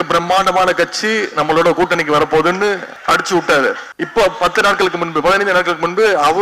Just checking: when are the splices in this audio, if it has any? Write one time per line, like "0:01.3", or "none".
0:02.9
0:03.9